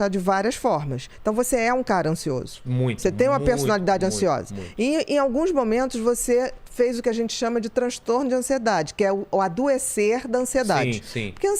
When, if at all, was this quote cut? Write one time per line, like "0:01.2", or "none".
none

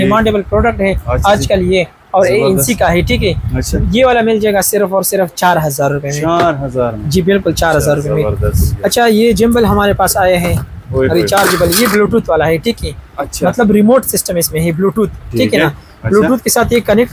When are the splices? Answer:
none

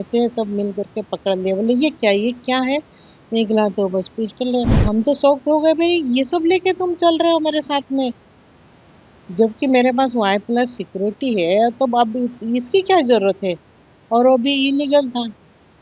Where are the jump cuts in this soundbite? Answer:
0:04.8

